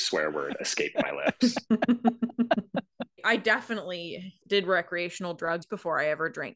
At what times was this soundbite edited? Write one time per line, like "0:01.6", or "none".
0:03.0
0:04.4